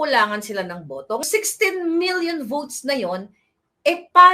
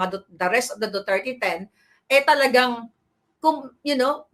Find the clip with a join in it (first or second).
first